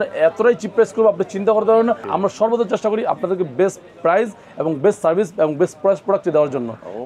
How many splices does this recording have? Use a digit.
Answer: 1